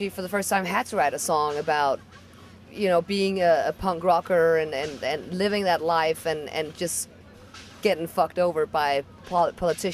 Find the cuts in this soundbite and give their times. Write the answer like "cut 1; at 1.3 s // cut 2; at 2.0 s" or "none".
cut 1; at 3.1 s